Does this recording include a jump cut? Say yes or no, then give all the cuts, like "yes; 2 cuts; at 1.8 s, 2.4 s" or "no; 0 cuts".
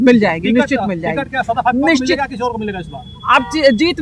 no; 0 cuts